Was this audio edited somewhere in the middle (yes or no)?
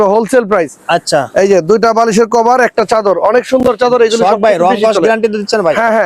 no